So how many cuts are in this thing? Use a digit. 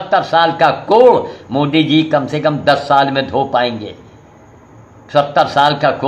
0